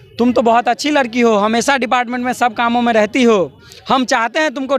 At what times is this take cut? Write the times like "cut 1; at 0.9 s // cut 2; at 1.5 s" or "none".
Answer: none